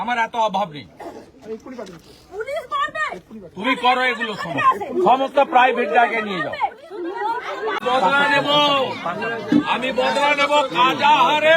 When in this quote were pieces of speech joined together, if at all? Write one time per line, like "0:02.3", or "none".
0:07.8